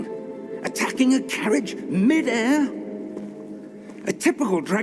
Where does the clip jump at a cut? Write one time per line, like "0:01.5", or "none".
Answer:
none